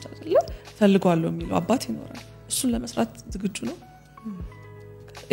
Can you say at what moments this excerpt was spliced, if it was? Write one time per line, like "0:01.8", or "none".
none